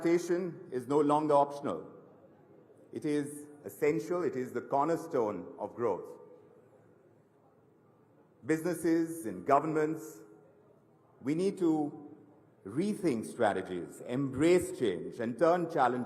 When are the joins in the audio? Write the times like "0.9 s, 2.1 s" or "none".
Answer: 6.2 s, 8.6 s